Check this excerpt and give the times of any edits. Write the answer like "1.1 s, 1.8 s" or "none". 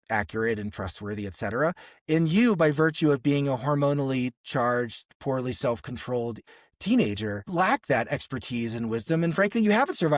6.4 s, 7.4 s

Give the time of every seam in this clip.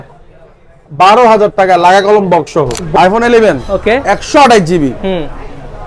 2.8 s

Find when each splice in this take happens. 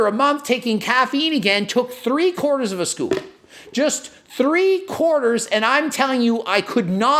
none

